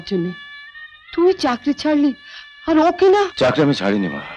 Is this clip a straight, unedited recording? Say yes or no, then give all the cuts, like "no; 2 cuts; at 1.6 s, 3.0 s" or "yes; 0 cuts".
yes; 0 cuts